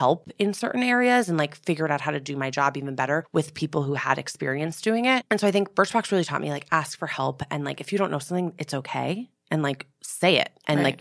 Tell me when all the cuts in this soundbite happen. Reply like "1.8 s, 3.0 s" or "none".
3.3 s, 5.2 s